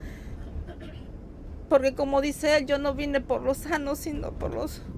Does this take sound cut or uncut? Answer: uncut